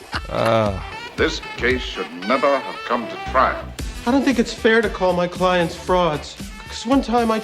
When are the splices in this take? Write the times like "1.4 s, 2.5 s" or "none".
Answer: 0.9 s